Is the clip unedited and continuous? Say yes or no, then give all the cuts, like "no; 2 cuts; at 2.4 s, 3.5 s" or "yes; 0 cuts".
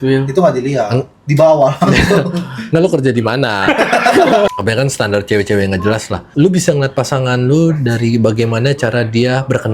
no; 2 cuts; at 4.5 s, 6.2 s